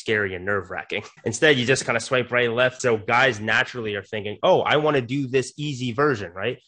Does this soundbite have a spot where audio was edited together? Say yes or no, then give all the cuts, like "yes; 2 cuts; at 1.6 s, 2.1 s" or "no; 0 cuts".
yes; 2 cuts; at 1.1 s, 2.8 s